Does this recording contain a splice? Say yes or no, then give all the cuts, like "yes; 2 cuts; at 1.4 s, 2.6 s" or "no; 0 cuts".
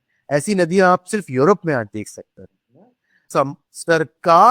yes; 1 cut; at 3.2 s